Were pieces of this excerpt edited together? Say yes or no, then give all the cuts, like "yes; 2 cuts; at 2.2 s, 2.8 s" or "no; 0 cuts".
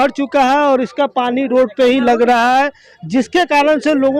no; 0 cuts